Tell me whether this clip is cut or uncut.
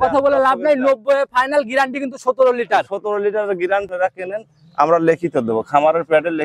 cut